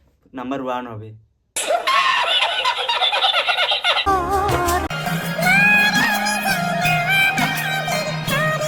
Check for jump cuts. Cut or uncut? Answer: uncut